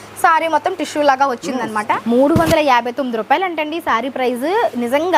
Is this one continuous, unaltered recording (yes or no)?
no